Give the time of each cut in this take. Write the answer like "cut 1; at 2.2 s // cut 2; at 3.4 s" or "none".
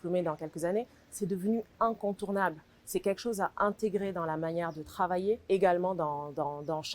cut 1; at 5.4 s